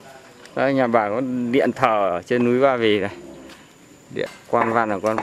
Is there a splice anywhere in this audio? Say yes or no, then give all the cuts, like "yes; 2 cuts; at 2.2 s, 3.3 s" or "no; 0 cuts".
yes; 1 cut; at 4.3 s